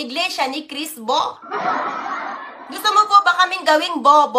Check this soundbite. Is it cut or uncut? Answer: cut